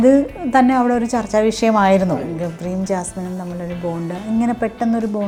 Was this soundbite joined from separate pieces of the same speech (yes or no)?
no